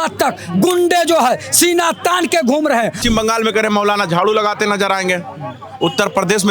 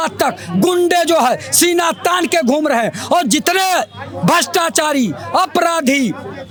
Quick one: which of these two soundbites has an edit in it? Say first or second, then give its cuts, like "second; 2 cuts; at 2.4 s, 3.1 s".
first; 1 cut; at 3.0 s